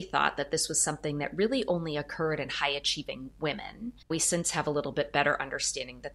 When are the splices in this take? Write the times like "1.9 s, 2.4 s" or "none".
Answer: 4.0 s